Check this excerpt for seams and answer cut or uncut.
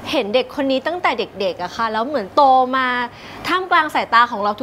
uncut